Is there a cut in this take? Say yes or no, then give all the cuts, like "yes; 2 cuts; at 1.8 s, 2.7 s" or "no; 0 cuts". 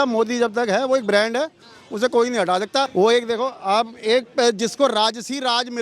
yes; 1 cut; at 2.9 s